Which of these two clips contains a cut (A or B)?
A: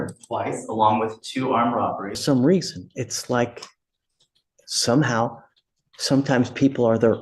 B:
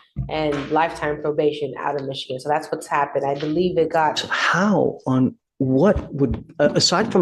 A